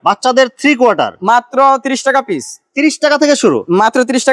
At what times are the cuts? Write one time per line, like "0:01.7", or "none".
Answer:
none